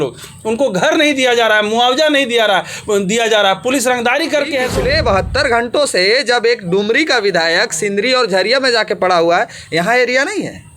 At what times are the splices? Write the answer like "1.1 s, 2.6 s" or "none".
4.7 s